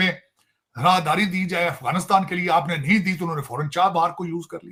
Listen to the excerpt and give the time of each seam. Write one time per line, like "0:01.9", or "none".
none